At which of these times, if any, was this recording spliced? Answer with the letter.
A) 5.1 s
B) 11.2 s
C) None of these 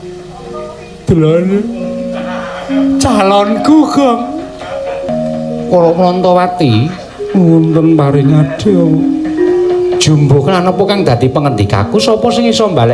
A